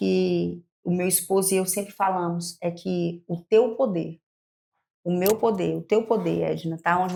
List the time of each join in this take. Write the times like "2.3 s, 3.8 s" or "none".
none